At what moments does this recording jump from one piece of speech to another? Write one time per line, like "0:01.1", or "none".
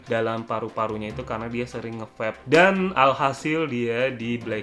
0:02.4